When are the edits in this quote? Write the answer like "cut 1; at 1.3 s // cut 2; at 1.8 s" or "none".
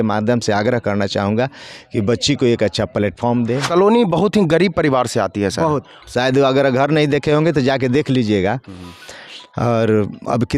cut 1; at 3.6 s